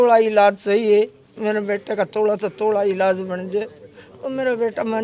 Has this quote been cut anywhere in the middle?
no; 0 cuts

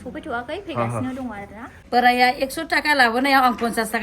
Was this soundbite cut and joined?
yes; 1 cut; at 1.8 s

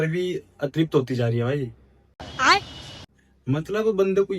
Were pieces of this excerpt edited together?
no; 0 cuts

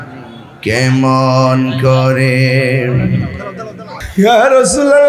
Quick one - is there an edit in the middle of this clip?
yes; 1 cut; at 4.0 s

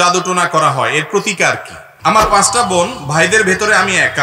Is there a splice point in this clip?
yes; 1 cut; at 1.9 s

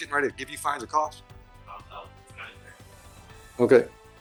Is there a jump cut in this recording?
no; 0 cuts

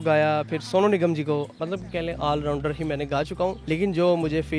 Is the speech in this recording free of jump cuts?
no; 2 cuts; at 1.5 s, 3.6 s

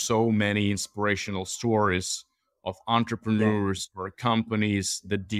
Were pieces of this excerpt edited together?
no; 0 cuts

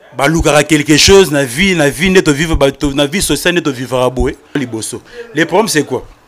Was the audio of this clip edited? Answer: yes; 1 cut; at 4.6 s

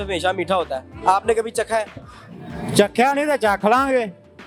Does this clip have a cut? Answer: no; 0 cuts

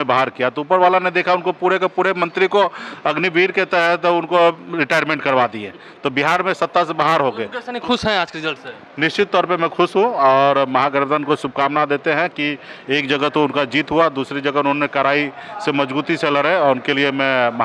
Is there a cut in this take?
no; 0 cuts

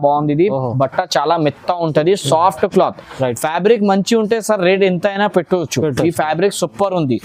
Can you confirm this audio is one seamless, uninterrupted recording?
yes; 0 cuts

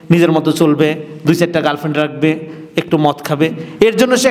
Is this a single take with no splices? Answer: yes; 0 cuts

